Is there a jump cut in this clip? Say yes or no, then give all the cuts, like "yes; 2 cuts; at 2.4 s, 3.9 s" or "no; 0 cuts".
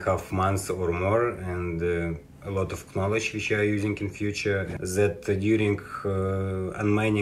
yes; 1 cut; at 4.7 s